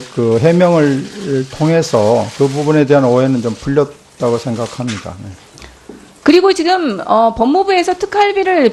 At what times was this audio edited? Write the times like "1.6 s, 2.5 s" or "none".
none